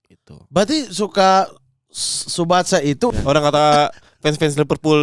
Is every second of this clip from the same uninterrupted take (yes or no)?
no